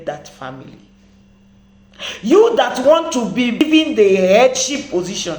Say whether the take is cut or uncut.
cut